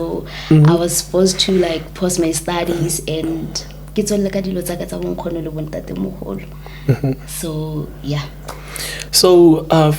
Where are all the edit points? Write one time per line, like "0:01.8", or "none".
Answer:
none

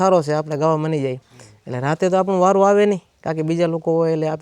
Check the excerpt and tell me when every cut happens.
none

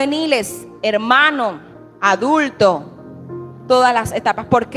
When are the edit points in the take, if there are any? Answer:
none

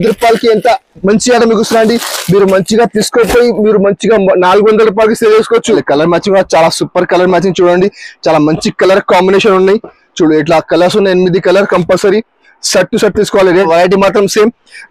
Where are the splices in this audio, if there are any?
0:05.8
0:13.7

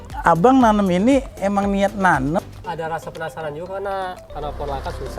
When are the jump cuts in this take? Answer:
0:02.4
0:04.3

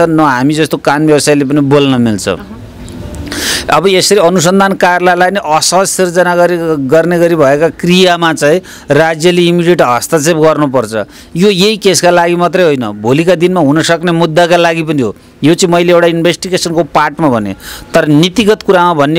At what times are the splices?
none

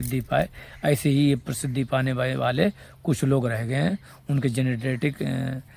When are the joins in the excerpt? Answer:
none

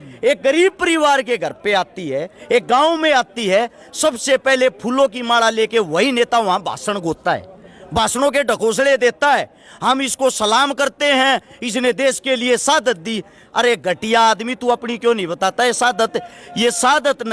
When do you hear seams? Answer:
none

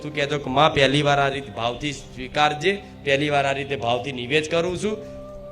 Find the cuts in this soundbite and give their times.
none

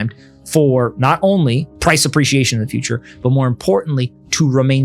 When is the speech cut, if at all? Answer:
0:01.7

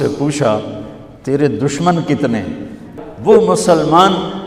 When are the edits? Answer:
0:03.4

